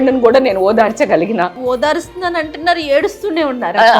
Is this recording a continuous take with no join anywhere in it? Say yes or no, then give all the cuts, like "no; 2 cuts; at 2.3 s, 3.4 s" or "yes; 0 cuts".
no; 1 cut; at 1.6 s